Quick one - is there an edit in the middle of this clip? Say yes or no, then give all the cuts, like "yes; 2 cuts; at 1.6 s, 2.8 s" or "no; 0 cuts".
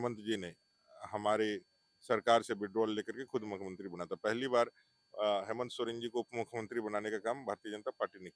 no; 0 cuts